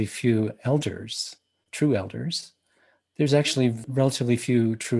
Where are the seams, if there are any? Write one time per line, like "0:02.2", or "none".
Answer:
0:03.8